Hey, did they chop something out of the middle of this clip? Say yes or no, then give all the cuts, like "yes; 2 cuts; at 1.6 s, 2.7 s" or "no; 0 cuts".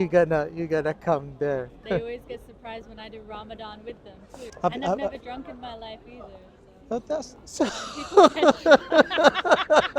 yes; 2 cuts; at 1.8 s, 4.5 s